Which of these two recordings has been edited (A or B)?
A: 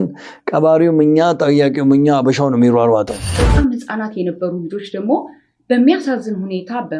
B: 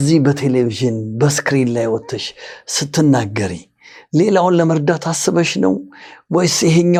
A